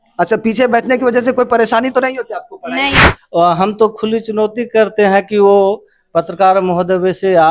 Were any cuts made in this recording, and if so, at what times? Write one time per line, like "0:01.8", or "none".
0:03.1